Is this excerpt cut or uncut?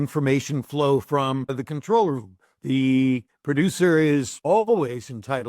cut